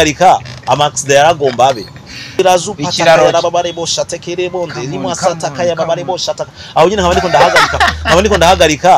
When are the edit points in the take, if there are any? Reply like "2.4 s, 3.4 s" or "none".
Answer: 2.4 s